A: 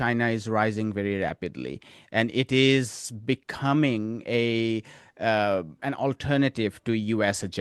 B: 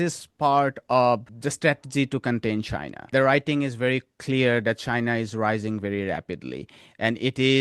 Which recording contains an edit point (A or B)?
B